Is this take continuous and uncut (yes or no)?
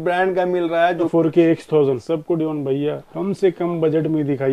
no